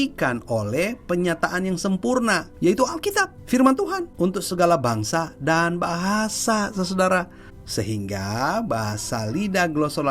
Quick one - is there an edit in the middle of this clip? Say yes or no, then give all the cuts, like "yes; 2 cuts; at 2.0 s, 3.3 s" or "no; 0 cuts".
yes; 2 cuts; at 2.5 s, 3.4 s